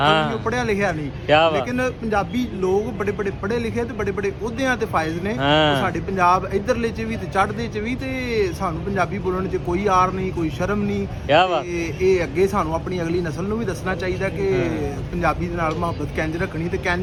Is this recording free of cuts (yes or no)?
yes